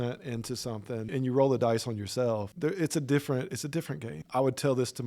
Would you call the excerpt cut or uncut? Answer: cut